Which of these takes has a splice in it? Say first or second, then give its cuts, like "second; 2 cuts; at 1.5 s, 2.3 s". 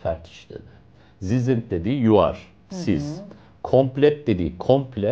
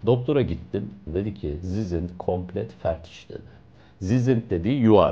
second; 1 cut; at 1.0 s